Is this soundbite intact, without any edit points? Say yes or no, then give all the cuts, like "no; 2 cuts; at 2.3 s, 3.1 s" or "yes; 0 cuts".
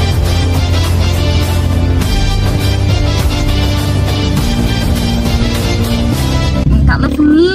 no; 1 cut; at 6.6 s